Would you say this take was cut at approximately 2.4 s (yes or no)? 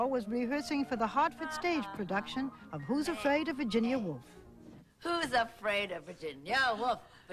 yes